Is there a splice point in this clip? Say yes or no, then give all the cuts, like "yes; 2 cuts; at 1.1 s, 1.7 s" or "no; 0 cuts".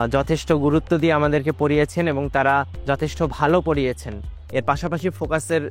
yes; 1 cut; at 4.3 s